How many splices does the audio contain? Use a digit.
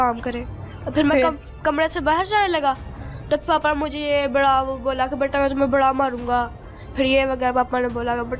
0